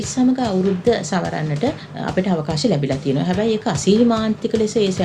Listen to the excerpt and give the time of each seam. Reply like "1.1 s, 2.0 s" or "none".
1.9 s